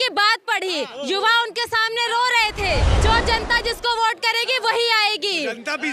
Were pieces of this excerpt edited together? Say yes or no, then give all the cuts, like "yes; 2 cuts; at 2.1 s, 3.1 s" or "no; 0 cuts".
yes; 1 cut; at 2.9 s